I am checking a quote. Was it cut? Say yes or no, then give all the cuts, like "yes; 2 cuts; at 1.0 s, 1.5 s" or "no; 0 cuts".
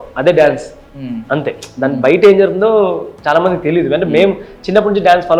no; 0 cuts